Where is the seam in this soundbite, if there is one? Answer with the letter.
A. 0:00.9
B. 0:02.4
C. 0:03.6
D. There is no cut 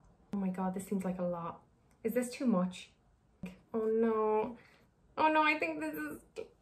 C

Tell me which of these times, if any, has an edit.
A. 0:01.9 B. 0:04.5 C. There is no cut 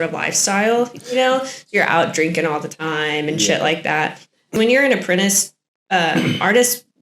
B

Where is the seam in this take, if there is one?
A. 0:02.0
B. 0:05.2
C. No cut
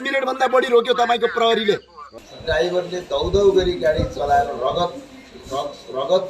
A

